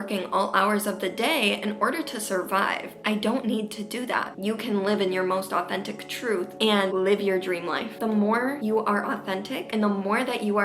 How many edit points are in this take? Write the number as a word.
two